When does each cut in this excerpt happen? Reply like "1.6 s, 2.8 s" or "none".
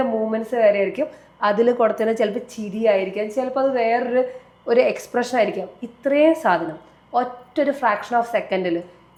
none